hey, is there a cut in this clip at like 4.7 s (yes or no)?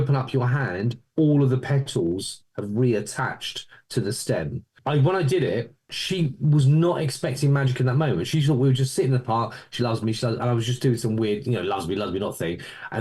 yes